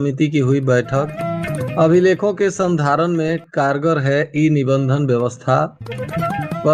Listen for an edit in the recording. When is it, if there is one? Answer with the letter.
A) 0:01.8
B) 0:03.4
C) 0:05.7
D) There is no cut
D